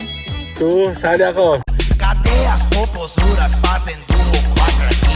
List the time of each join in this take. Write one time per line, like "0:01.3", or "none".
0:01.7